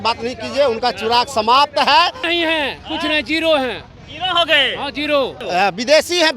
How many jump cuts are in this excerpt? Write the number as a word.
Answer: two